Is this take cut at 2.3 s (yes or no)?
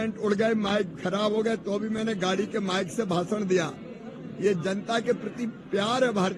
no